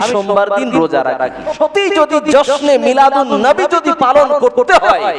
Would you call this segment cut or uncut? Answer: cut